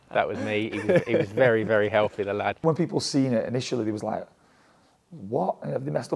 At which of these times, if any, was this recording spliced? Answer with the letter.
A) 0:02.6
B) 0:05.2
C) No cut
A